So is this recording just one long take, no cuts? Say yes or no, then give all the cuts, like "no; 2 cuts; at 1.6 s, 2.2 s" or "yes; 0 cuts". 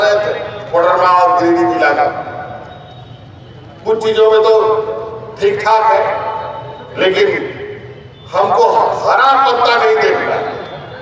yes; 0 cuts